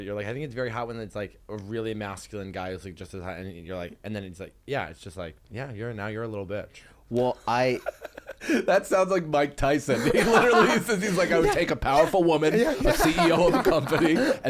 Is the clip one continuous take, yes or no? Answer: yes